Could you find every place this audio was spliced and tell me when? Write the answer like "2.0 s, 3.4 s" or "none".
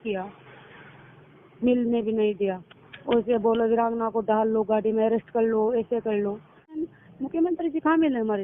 6.7 s